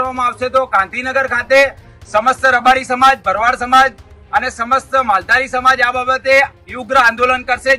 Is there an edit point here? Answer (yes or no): no